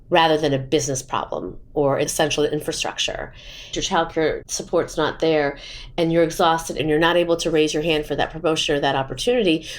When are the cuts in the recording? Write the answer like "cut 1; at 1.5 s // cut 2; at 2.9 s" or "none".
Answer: cut 1; at 3.7 s // cut 2; at 6.8 s